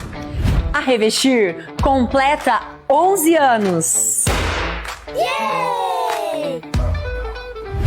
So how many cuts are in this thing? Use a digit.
2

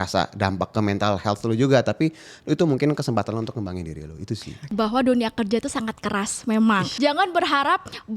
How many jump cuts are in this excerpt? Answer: 2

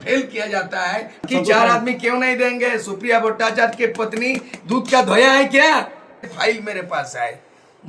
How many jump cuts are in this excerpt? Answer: 2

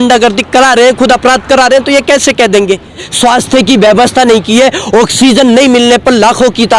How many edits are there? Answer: 1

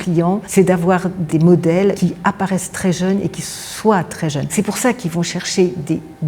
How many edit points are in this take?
2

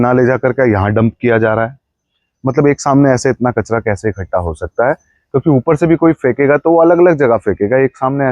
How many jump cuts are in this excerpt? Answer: 0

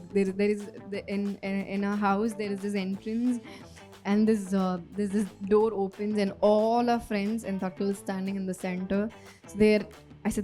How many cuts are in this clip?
0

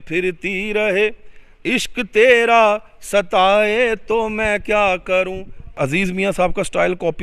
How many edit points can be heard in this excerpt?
1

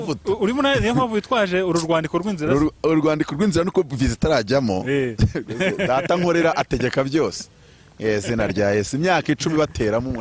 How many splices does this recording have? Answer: 0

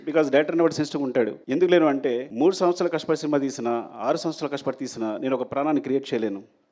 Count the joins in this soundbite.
2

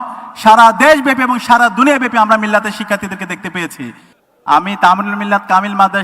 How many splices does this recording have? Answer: 1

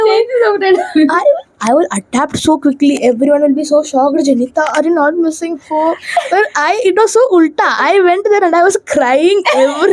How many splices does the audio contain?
0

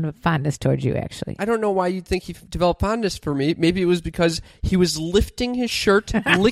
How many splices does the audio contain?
1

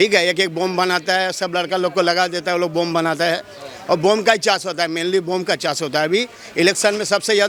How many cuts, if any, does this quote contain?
0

